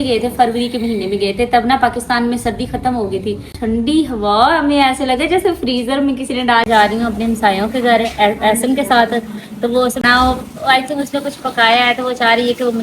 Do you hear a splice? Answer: yes; 3 cuts; at 3.5 s, 6.7 s, 10.0 s

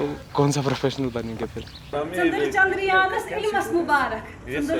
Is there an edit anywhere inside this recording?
yes; 1 cut; at 1.9 s

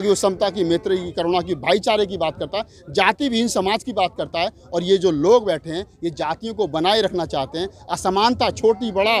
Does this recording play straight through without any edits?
yes; 0 cuts

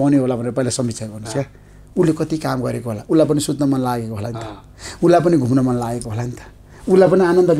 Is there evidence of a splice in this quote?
no; 0 cuts

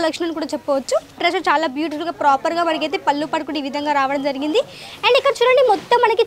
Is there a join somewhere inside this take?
yes; 1 cut; at 1.2 s

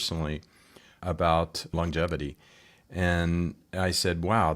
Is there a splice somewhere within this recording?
yes; 2 cuts; at 1.0 s, 1.7 s

